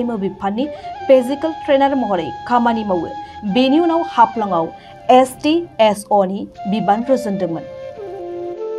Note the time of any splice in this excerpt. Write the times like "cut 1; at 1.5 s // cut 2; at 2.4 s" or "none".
cut 1; at 7.7 s